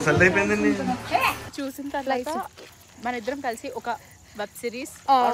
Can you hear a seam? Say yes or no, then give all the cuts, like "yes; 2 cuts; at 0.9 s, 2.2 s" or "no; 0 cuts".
yes; 1 cut; at 1.5 s